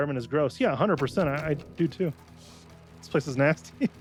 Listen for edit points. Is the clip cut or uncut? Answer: uncut